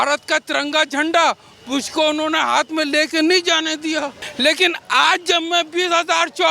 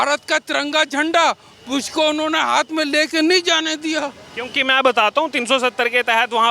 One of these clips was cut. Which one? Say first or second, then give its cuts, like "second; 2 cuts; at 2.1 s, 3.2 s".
first; 1 cut; at 4.2 s